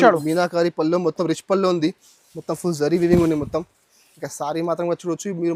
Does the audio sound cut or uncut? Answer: uncut